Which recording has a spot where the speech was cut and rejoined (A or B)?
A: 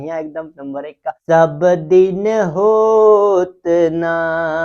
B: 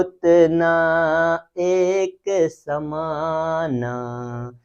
A